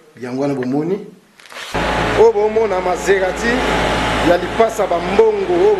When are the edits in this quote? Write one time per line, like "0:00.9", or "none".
0:01.7